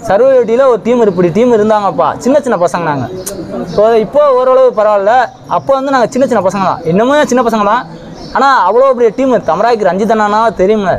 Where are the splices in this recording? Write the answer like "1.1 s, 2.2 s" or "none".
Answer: none